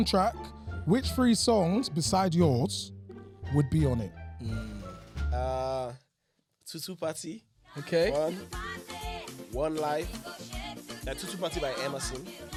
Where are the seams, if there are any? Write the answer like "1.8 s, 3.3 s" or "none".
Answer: none